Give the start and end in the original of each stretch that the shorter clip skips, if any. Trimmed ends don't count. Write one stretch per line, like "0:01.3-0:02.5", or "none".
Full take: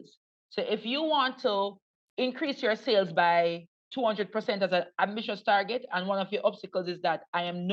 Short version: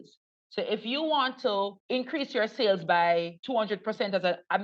0:01.8-0:02.1
0:03.7-0:03.9